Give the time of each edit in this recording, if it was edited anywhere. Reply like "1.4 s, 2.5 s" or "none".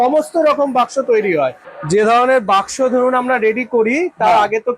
1.6 s